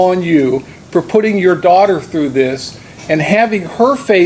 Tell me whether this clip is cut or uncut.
uncut